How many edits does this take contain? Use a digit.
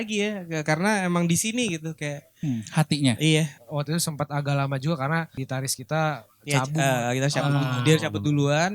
2